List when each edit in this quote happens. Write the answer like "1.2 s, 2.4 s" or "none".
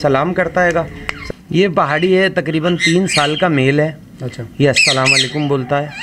1.1 s